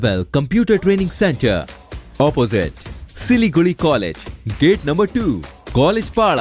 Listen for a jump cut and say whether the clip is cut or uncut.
uncut